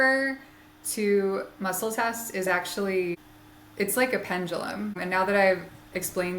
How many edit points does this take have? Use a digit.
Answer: 2